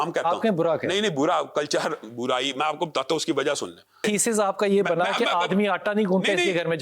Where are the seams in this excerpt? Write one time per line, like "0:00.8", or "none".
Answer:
0:04.0